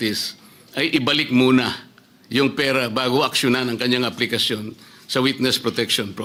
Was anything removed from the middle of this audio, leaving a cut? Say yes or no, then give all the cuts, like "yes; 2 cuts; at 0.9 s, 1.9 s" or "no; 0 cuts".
no; 0 cuts